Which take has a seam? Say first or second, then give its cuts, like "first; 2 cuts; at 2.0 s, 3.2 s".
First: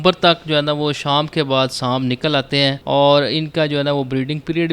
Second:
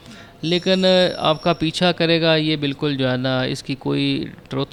first; 1 cut; at 2.8 s